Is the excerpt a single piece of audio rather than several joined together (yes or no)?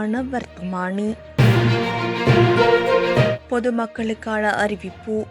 no